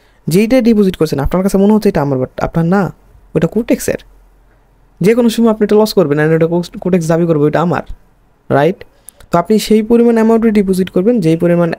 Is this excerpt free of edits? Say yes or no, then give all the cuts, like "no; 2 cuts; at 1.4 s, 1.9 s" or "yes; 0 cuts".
yes; 0 cuts